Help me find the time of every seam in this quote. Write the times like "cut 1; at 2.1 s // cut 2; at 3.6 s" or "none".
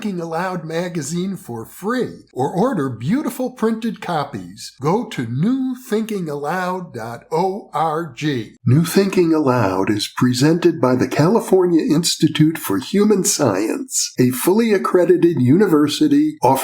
cut 1; at 8.5 s

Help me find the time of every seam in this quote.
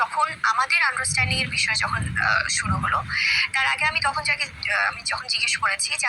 cut 1; at 4.1 s

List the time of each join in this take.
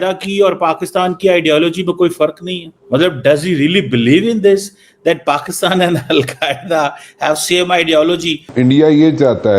cut 1; at 8.5 s

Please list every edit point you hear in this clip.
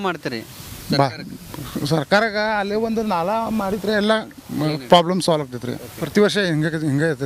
cut 1; at 5.9 s

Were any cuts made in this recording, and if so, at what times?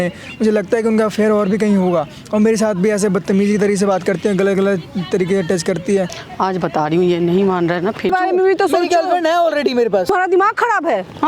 cut 1; at 6.2 s // cut 2; at 8.1 s // cut 3; at 10.1 s

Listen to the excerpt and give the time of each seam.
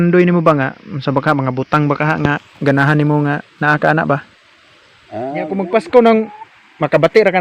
cut 1; at 5.5 s

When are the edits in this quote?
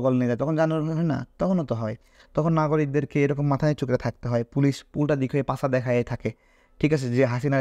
none

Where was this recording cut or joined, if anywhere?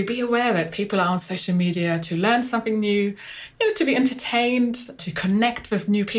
cut 1; at 5.0 s

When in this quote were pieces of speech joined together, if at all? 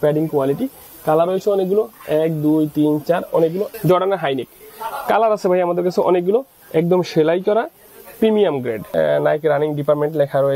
cut 1; at 3.7 s // cut 2; at 8.9 s

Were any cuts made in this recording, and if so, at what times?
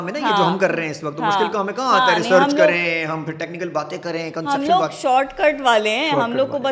none

